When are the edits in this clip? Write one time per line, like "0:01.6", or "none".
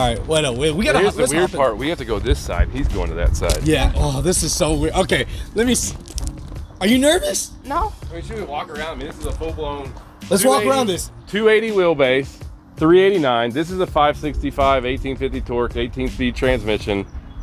none

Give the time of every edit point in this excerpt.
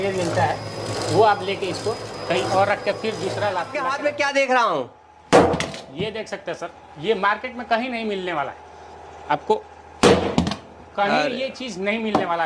0:03.7

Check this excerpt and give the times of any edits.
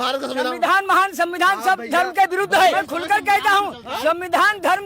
0:02.7

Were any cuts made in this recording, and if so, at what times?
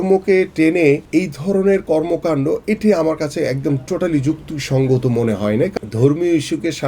0:01.0
0:05.7

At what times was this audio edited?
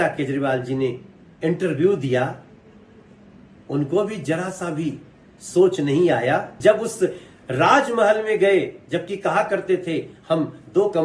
0:06.5

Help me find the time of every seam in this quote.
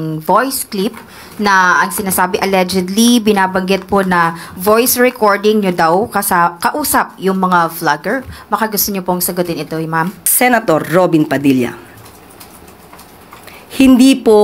0:10.2

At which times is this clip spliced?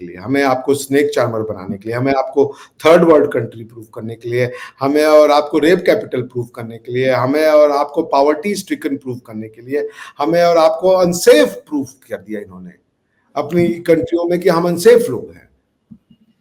none

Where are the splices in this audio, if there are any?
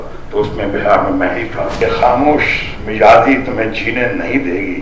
0:01.7

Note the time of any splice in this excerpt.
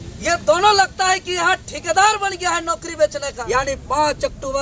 0:03.3

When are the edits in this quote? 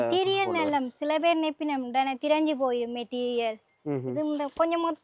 none

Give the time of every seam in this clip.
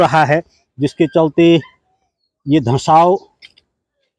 none

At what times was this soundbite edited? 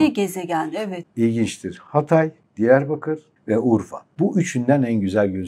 0:00.9
0:02.4
0:03.3
0:04.0

